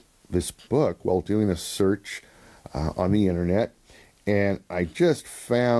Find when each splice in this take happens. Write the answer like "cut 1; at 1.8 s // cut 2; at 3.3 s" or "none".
none